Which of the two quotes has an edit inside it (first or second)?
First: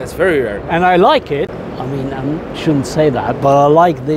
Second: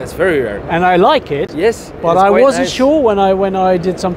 first